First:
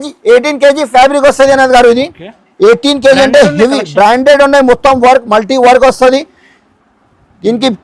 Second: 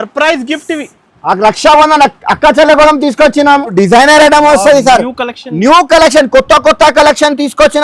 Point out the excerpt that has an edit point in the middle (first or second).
second